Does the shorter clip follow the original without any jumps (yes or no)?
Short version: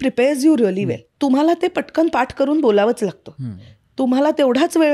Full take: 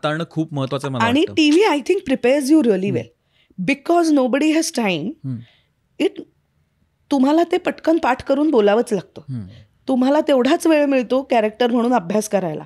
no